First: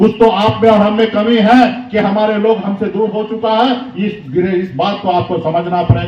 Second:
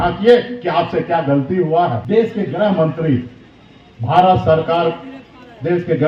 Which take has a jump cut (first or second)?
second